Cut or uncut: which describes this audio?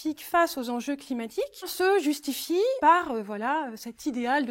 cut